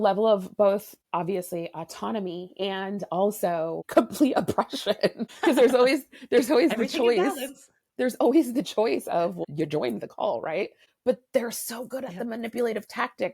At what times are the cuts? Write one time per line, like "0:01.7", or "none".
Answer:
0:01.0
0:03.8
0:05.3
0:09.4
0:10.8